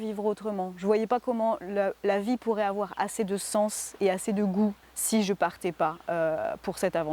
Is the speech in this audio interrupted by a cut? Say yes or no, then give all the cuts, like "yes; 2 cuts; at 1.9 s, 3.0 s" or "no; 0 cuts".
yes; 1 cut; at 4.9 s